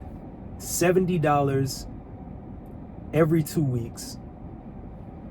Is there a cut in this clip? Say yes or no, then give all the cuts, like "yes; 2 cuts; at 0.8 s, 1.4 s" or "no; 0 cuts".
no; 0 cuts